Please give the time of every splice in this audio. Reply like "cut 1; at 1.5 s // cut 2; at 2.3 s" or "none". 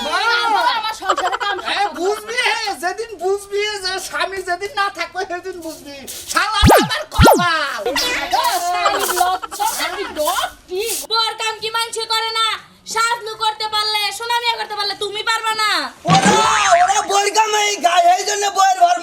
cut 1; at 11.0 s